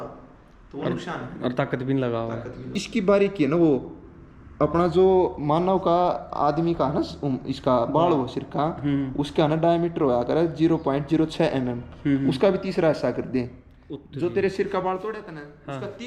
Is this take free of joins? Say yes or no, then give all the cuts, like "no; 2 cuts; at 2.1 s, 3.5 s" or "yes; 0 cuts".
no; 1 cut; at 2.8 s